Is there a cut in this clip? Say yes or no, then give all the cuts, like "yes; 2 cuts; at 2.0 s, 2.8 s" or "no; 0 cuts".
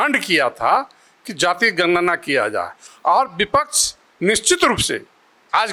no; 0 cuts